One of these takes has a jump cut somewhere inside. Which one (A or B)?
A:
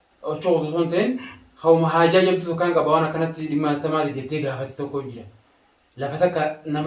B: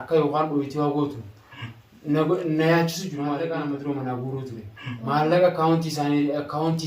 B